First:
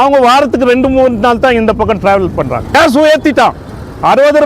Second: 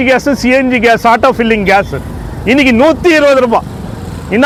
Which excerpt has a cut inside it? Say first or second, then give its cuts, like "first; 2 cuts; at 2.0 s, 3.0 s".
first; 1 cut; at 2.7 s